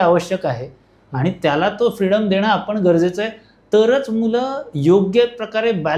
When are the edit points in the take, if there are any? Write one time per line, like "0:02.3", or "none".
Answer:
none